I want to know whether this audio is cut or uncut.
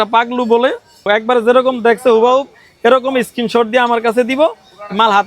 cut